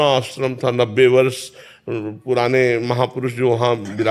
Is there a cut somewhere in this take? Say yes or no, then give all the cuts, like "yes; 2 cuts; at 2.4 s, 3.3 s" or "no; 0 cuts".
no; 0 cuts